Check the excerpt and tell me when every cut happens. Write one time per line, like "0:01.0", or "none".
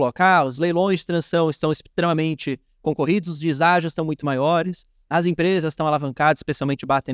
none